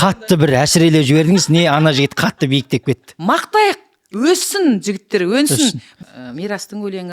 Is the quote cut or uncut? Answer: cut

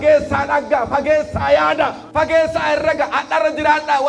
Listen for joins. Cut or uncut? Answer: cut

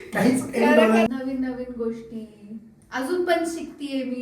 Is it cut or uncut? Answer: cut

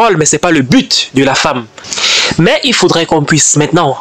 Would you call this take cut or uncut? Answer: cut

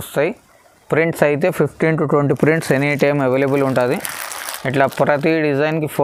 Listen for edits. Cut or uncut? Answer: uncut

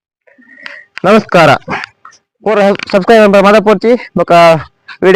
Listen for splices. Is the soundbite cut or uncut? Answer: uncut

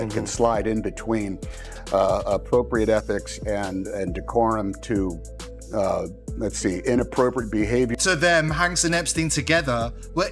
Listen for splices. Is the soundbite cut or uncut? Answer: cut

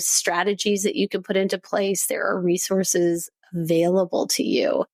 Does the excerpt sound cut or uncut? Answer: uncut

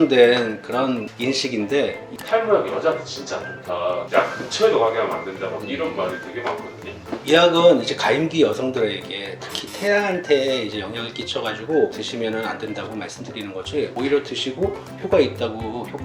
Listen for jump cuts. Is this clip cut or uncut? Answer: cut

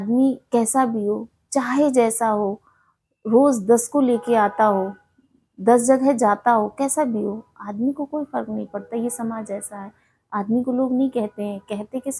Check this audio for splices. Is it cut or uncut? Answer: uncut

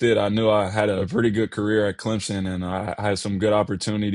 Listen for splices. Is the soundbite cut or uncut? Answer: cut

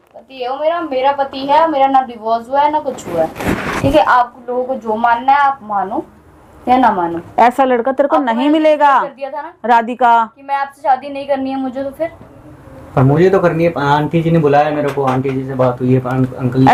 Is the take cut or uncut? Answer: uncut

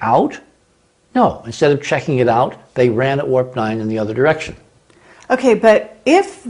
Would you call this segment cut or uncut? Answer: uncut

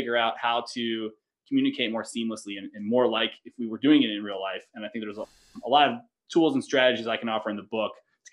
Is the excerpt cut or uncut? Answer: uncut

